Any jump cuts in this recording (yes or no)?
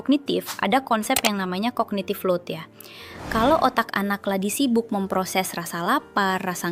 no